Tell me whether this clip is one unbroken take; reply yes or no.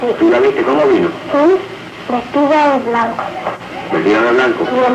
no